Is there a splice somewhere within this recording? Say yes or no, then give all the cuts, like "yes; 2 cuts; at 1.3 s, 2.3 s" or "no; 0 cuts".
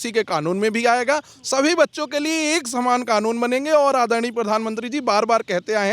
no; 0 cuts